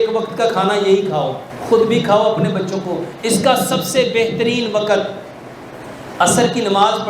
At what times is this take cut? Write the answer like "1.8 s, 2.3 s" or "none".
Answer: 1.5 s